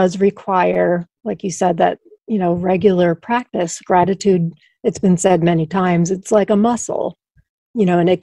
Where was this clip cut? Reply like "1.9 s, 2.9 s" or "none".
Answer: none